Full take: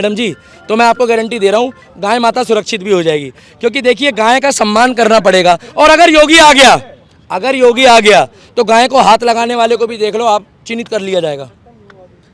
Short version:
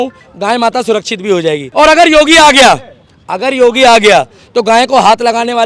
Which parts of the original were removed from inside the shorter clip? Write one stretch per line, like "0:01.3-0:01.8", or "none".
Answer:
0:03.3-0:05.7